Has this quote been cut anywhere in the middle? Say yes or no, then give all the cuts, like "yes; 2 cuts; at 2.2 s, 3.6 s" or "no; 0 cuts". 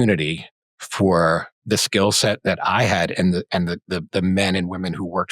yes; 1 cut; at 1.5 s